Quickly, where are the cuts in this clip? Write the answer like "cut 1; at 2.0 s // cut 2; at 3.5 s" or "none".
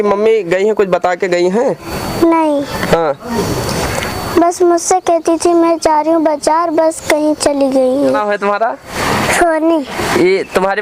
cut 1; at 8.2 s